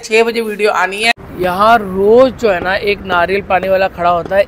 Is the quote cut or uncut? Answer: cut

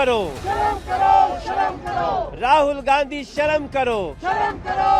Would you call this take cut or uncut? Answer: uncut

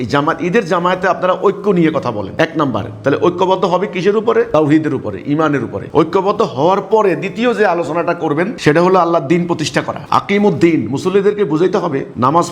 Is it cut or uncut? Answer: uncut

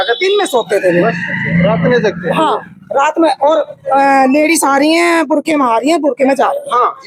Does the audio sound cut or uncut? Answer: uncut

